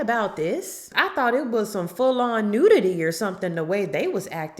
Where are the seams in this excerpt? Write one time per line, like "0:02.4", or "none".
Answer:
0:00.9